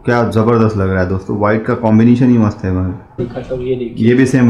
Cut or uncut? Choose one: cut